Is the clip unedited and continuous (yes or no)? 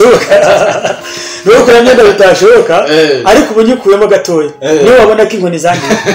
yes